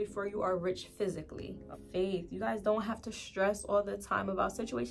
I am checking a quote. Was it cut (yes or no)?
yes